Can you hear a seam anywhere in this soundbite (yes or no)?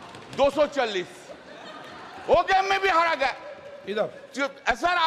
no